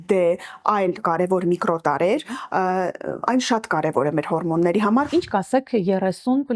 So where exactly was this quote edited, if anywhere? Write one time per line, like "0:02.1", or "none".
0:05.1